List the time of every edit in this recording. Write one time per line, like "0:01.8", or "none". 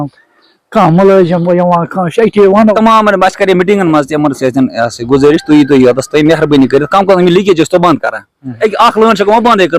0:02.8
0:08.6